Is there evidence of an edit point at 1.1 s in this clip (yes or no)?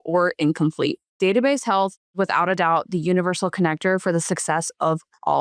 yes